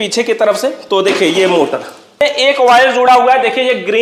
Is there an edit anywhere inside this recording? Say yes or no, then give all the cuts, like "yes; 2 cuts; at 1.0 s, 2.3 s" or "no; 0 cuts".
yes; 1 cut; at 2.2 s